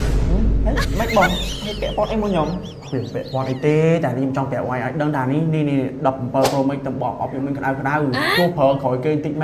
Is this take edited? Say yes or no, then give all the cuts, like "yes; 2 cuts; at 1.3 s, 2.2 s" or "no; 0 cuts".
no; 0 cuts